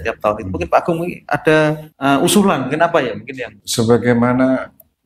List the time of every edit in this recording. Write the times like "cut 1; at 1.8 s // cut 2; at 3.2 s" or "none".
cut 1; at 1.9 s // cut 2; at 3.6 s